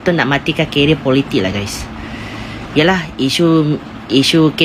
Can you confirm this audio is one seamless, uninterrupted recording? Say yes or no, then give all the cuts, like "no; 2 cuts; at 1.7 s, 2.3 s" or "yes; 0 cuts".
yes; 0 cuts